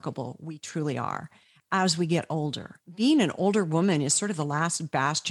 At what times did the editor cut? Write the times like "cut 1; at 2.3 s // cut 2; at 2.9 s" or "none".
cut 1; at 2.8 s